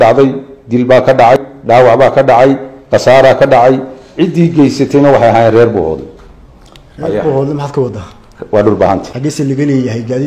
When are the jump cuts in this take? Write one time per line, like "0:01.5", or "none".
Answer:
0:01.4
0:09.1